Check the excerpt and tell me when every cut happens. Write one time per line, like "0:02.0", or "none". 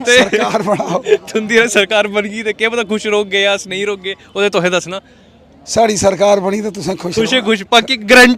none